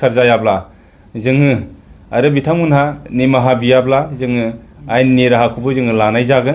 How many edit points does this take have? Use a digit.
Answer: 0